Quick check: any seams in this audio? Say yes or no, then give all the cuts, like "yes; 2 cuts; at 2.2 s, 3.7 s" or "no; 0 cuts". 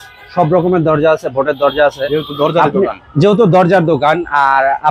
no; 0 cuts